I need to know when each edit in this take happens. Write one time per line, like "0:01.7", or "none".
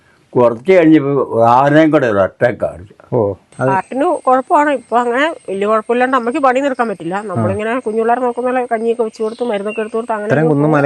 0:03.5